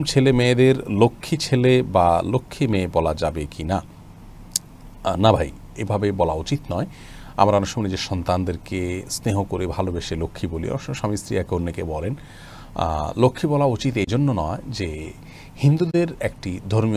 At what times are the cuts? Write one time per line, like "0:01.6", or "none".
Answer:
none